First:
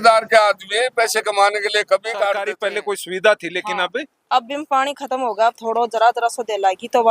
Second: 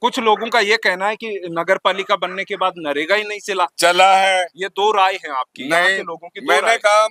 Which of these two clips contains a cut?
first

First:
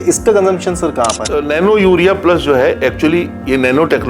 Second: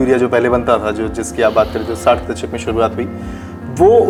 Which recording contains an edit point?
first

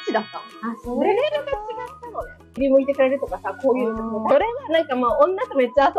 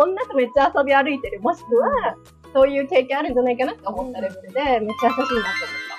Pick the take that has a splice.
first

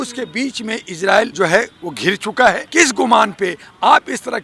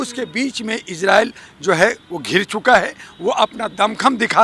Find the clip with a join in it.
first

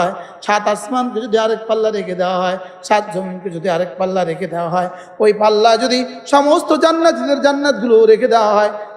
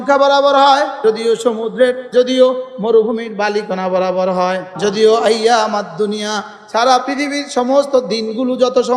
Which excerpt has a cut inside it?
second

